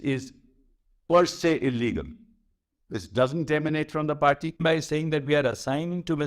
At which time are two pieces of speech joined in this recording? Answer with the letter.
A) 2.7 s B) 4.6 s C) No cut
B